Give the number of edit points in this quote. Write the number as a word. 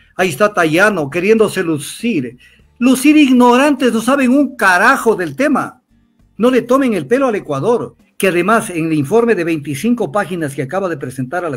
one